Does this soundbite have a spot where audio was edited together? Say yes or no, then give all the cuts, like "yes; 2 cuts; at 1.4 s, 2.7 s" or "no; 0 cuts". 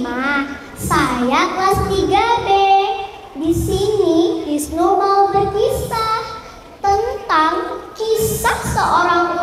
no; 0 cuts